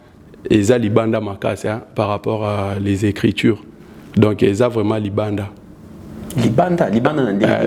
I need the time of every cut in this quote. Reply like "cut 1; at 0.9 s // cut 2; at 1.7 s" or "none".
none